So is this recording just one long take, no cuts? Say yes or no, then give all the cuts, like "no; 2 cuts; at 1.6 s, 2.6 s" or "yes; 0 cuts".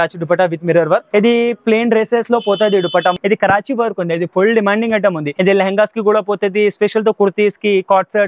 no; 3 cuts; at 1.1 s, 3.2 s, 5.3 s